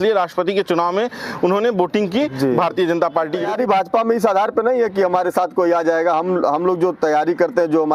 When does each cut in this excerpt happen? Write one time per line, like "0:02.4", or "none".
0:03.5